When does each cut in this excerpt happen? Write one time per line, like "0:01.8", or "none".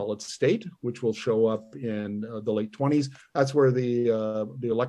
none